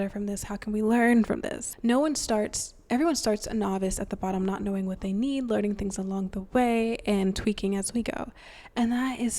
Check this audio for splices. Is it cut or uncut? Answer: cut